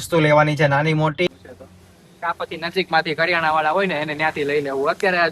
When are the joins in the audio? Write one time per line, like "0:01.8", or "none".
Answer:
0:01.3